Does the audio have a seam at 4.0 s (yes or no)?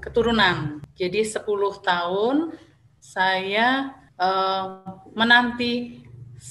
yes